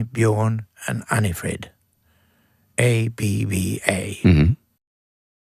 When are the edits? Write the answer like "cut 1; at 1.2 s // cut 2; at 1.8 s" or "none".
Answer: none